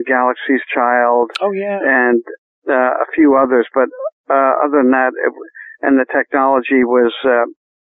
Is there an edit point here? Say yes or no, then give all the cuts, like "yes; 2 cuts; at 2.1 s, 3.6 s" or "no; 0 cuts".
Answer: no; 0 cuts